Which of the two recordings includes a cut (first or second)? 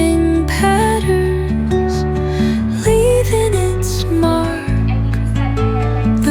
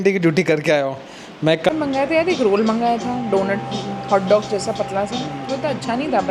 second